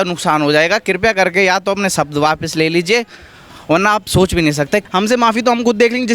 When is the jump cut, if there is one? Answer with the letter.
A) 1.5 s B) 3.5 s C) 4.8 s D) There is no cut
C